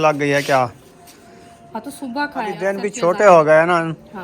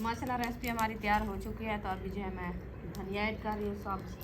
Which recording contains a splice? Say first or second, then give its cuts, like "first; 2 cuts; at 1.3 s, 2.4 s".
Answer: first; 1 cut; at 2.6 s